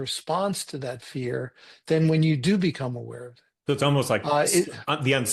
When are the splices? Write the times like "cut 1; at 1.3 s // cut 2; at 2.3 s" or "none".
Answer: none